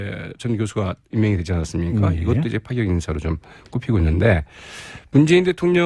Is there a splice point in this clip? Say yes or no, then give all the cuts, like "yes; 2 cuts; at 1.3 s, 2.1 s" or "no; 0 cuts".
no; 0 cuts